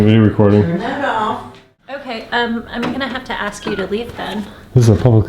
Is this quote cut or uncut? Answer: cut